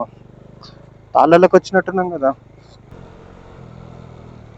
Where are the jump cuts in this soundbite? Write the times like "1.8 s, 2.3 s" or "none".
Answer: 2.9 s